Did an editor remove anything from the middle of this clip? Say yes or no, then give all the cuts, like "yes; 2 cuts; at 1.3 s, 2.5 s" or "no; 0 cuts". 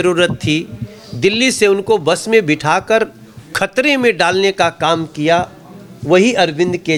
no; 0 cuts